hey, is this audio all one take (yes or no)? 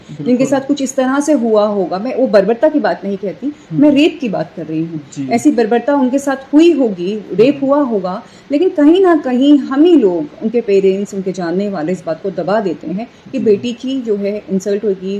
yes